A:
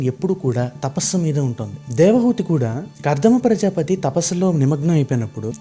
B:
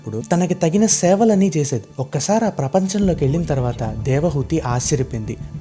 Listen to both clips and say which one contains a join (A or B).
B